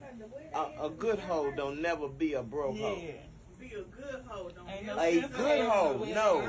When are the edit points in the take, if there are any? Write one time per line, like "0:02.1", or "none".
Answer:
0:04.9